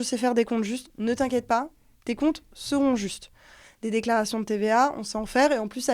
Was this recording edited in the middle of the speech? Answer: no; 0 cuts

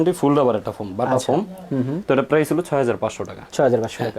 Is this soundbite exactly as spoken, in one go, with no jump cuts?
yes; 0 cuts

